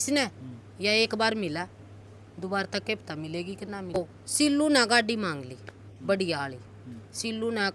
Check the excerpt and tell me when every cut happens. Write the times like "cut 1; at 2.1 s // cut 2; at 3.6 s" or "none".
cut 1; at 4.0 s